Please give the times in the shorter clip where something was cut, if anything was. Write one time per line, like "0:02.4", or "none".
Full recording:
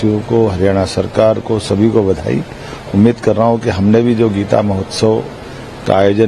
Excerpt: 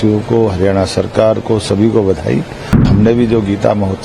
0:02.8